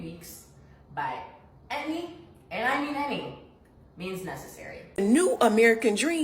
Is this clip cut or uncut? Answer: cut